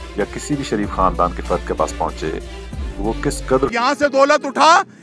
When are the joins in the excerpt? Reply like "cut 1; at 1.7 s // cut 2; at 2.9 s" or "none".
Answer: cut 1; at 3.7 s